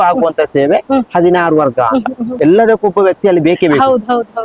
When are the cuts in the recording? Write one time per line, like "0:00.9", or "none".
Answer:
0:02.3